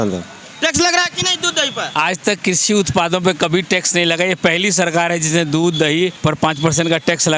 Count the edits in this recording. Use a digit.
1